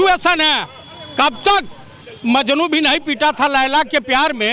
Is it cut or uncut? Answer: uncut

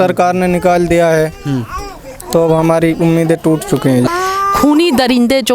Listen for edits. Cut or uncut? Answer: cut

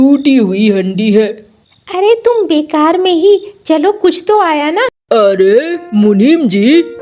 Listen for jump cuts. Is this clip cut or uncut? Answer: cut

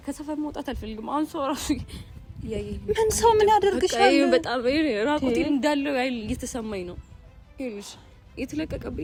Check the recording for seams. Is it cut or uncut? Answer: uncut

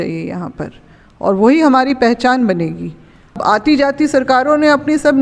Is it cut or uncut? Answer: cut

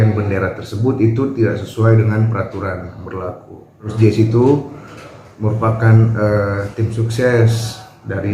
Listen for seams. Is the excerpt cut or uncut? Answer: cut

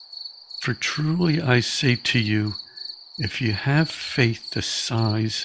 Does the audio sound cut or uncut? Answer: uncut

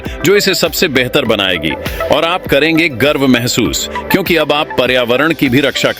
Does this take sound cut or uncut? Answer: uncut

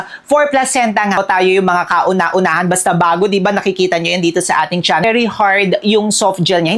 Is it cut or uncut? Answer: cut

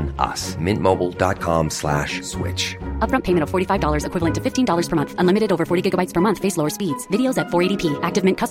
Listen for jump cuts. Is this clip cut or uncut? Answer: uncut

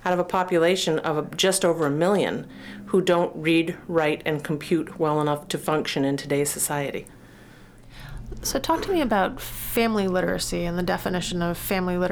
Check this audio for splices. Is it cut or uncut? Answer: uncut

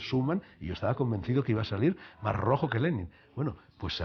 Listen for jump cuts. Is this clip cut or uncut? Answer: uncut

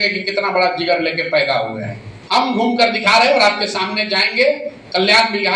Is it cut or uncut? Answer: uncut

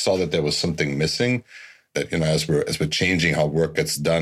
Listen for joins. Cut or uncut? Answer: cut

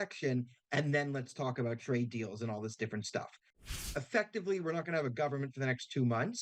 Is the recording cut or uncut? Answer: cut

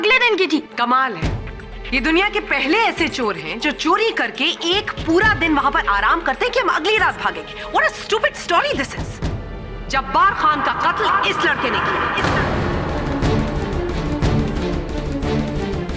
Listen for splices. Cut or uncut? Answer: uncut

